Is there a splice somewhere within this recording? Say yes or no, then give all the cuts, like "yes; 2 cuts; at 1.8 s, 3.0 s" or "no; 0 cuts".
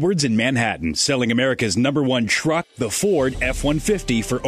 no; 0 cuts